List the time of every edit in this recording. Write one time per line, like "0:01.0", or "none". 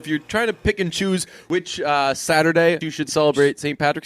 0:01.5
0:02.8